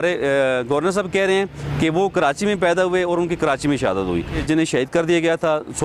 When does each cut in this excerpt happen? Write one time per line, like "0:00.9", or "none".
0:04.4